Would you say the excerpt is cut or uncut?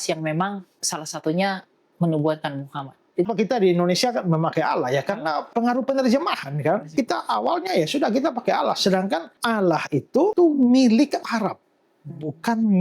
cut